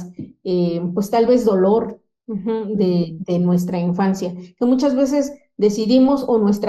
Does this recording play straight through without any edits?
yes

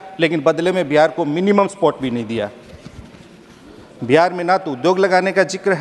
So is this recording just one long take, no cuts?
yes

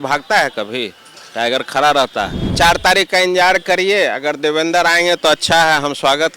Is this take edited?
yes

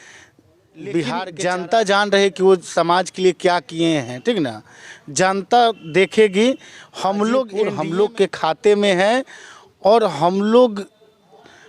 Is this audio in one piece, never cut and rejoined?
no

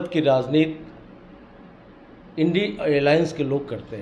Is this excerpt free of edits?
yes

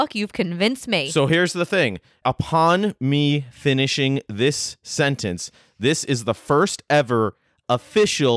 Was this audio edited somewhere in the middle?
yes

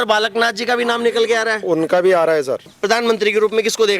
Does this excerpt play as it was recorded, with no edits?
no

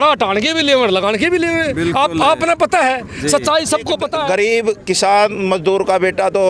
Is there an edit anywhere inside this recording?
yes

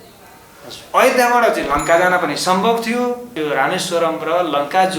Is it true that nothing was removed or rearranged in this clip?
no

